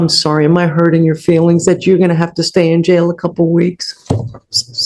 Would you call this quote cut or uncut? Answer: uncut